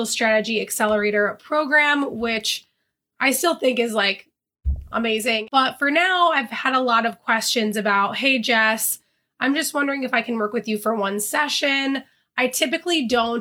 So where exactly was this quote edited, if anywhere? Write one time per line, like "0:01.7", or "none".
0:05.4

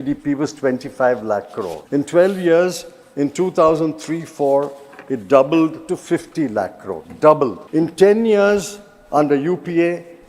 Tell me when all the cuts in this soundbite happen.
0:01.8
0:07.6

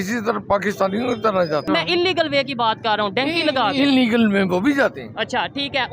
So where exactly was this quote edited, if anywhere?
0:01.7

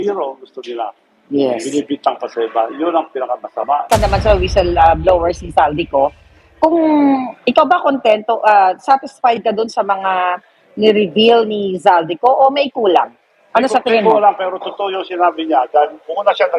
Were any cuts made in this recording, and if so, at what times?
0:03.8

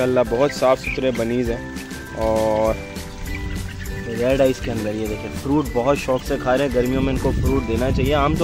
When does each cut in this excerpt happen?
none

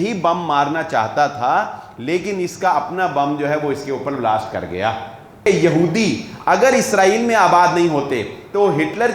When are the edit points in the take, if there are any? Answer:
0:05.5

